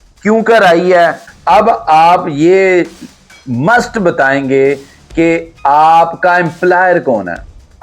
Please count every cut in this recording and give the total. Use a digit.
1